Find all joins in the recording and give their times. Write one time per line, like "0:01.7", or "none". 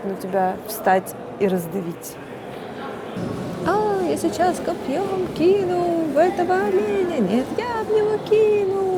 0:03.1